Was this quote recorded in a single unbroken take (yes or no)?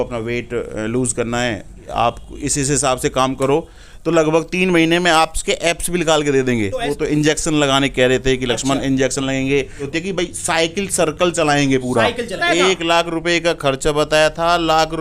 no